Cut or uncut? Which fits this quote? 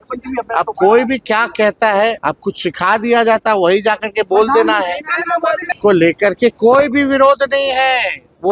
cut